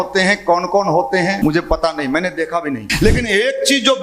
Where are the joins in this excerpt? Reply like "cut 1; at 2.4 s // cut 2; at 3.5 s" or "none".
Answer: cut 1; at 1.4 s // cut 2; at 2.9 s